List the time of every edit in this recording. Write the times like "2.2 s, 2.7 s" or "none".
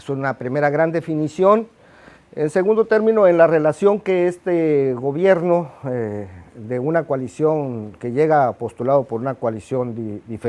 none